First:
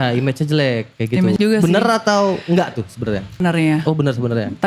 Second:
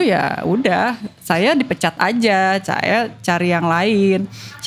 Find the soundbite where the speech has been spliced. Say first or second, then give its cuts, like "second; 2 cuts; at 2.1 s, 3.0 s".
first; 2 cuts; at 1.3 s, 3.4 s